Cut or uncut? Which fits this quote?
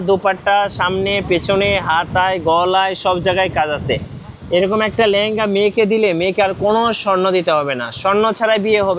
uncut